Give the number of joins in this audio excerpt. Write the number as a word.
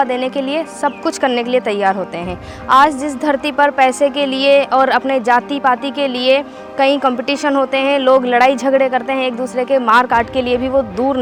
zero